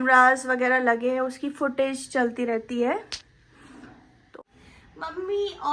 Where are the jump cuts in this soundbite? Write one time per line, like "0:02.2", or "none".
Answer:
0:04.4